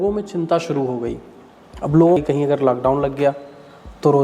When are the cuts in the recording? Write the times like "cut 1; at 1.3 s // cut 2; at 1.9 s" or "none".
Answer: cut 1; at 2.2 s